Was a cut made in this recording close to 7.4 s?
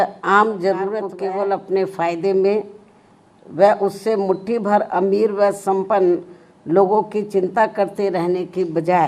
no; 1 cut; at 1.1 s

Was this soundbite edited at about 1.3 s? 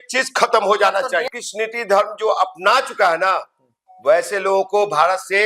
yes; 1 cut; at 1.3 s

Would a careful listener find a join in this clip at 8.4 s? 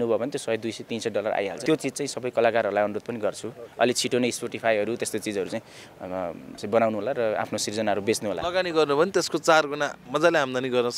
yes; 2 cuts; at 1.6 s, 8.4 s

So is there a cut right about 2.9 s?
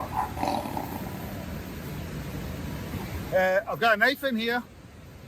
yes; 1 cut; at 2.9 s

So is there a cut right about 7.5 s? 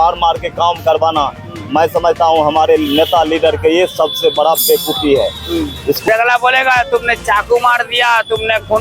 no; 1 cut; at 6.1 s

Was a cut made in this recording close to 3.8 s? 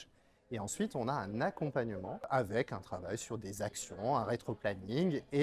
no; 1 cut; at 2.3 s

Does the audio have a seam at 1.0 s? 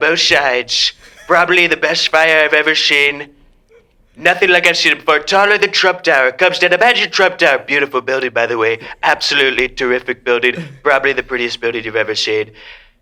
no; 0 cuts

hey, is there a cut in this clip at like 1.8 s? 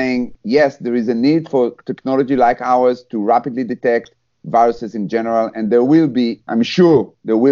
no; 1 cut; at 6.4 s

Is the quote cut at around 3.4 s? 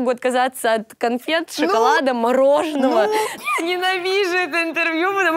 yes; 1 cut; at 3.4 s

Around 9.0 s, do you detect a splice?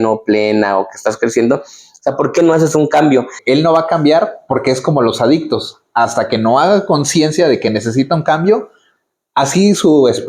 no; 1 cut; at 3.4 s

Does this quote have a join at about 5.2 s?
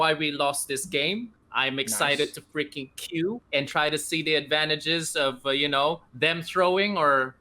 no; 2 cuts; at 1.4 s, 3.4 s

